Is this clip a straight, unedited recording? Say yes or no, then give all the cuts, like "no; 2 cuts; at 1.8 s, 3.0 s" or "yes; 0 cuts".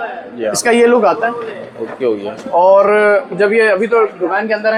yes; 0 cuts